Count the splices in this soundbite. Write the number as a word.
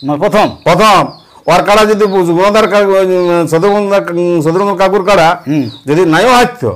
zero